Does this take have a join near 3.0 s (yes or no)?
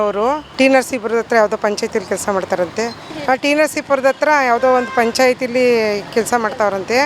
no